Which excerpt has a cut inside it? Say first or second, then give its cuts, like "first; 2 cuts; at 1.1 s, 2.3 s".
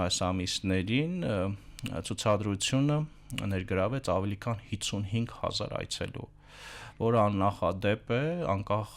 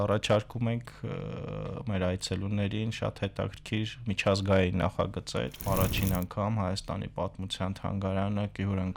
second; 1 cut; at 5.7 s